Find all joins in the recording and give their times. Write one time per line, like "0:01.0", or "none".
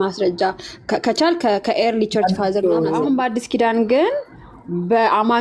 0:03.0